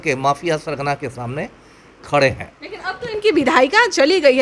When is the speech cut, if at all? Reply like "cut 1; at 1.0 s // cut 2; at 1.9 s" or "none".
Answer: none